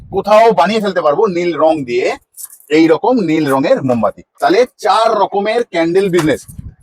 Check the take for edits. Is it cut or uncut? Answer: cut